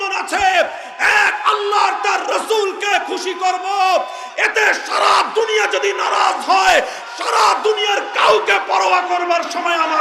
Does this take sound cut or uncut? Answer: uncut